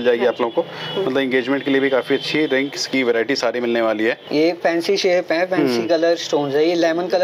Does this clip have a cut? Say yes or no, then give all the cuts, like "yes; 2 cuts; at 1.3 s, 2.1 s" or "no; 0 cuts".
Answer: yes; 1 cut; at 4.2 s